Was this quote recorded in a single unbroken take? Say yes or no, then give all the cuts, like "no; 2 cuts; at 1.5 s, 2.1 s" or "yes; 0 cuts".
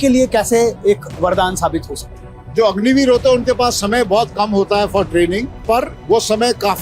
no; 1 cut; at 5.5 s